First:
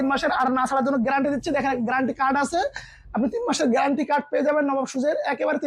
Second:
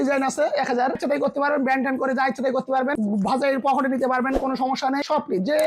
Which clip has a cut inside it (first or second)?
second